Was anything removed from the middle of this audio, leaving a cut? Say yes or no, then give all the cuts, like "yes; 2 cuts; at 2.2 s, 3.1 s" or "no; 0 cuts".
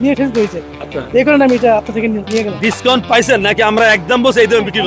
yes; 1 cut; at 2.6 s